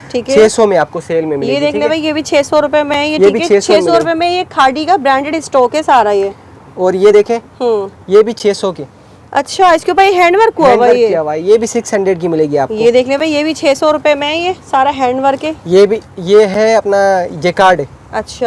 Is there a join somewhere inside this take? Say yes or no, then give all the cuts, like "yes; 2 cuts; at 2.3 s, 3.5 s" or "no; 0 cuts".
no; 0 cuts